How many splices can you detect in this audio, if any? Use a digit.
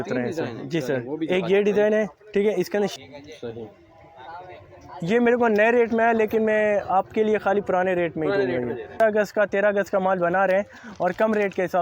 2